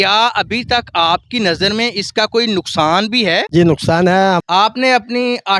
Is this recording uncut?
no; 1 cut; at 4.4 s

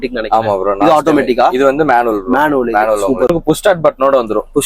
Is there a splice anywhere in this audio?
yes; 1 cut; at 3.3 s

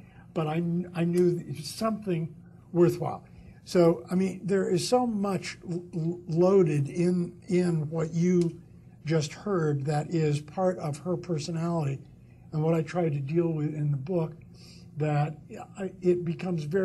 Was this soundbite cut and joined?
yes; 1 cut; at 9.0 s

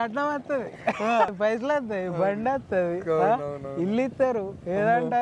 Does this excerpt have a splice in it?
no; 0 cuts

